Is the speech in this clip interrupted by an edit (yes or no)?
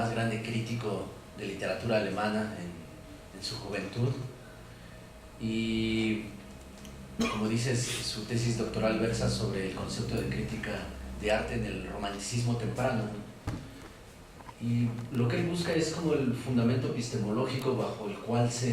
yes